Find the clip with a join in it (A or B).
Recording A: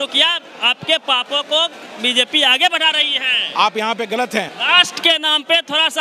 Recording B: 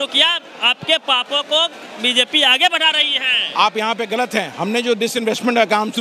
A